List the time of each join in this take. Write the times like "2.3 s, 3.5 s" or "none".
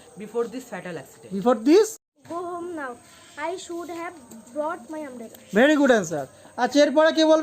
2.1 s